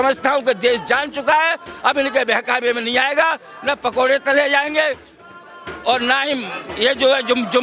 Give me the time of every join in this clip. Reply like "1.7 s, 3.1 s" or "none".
none